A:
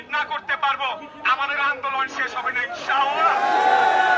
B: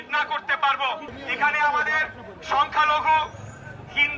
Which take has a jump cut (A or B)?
B